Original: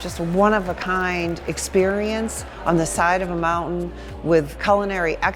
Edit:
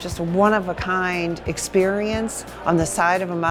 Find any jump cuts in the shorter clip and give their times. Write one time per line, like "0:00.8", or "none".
none